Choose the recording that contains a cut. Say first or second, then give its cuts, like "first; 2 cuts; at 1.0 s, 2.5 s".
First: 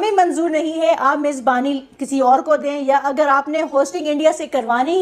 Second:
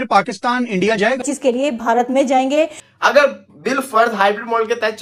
second; 2 cuts; at 1.3 s, 2.8 s